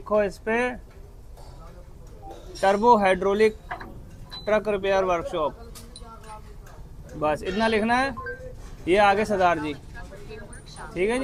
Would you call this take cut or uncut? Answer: uncut